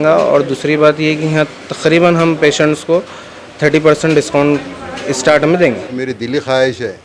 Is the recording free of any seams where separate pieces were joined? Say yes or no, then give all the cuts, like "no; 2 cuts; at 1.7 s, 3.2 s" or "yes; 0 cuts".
no; 1 cut; at 6.0 s